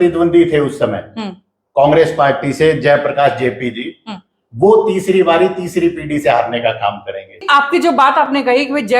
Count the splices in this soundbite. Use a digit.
1